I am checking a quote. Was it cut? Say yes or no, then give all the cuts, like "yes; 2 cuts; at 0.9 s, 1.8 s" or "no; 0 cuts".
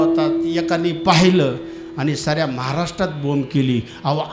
no; 0 cuts